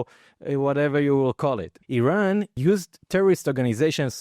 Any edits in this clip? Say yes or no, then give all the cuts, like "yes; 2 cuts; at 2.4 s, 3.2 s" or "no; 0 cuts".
yes; 1 cut; at 1.8 s